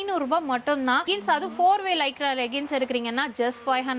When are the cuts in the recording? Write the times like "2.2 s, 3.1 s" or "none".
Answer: 1.0 s